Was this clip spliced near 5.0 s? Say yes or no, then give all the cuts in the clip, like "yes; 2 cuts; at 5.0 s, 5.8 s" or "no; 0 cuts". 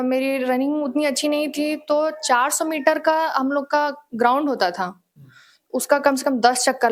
no; 0 cuts